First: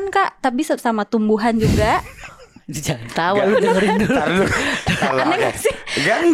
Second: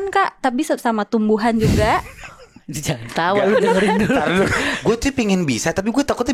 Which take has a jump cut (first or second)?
second